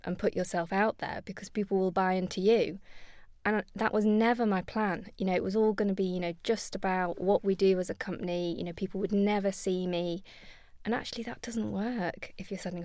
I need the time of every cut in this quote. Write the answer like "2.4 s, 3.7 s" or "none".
none